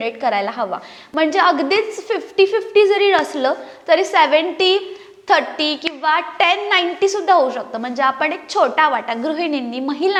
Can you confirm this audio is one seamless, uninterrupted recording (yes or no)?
yes